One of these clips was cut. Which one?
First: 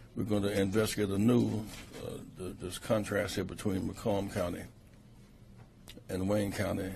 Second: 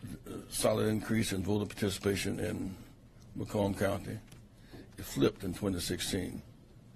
first; 1 cut; at 2.7 s

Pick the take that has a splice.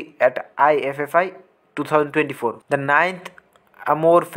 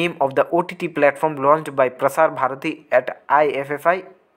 first; 1 cut; at 2.6 s

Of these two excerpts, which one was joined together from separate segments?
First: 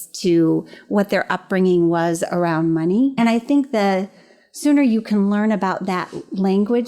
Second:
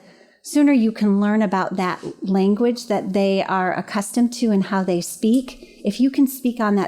first; 1 cut; at 3.1 s

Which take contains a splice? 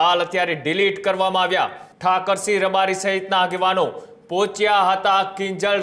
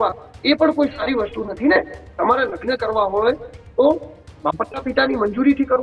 first; 1 cut; at 1.8 s

